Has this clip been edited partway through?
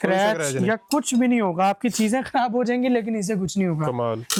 no; 0 cuts

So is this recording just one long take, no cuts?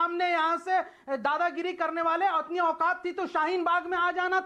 yes; 0 cuts

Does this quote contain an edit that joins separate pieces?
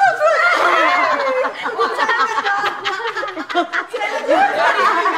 no; 0 cuts

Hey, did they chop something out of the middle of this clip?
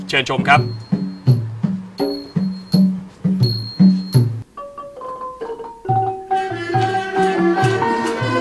no; 0 cuts

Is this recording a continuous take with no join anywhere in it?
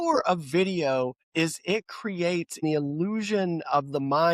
no; 2 cuts; at 1.2 s, 2.6 s

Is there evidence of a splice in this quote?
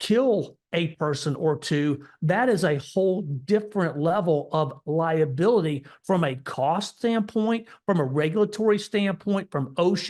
no; 0 cuts

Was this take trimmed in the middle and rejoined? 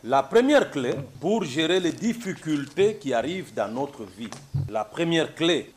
yes; 2 cuts; at 1.1 s, 4.7 s

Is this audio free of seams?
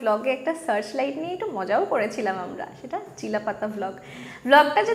yes; 0 cuts

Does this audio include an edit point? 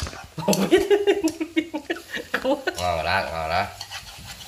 yes; 1 cut; at 2.8 s

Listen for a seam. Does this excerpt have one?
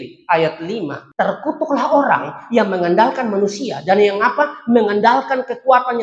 yes; 1 cut; at 1.0 s

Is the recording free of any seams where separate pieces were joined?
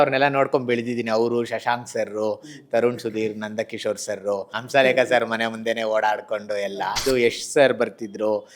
no; 2 cuts; at 4.5 s, 7.0 s

